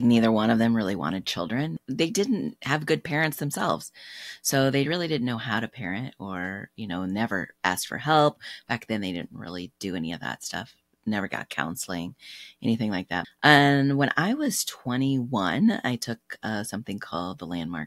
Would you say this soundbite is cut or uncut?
cut